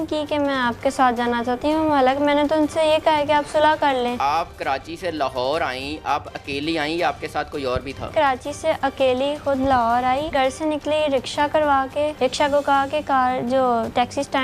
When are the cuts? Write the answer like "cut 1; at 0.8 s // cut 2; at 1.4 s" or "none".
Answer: cut 1; at 4.2 s // cut 2; at 8.1 s // cut 3; at 10.3 s // cut 4; at 12.1 s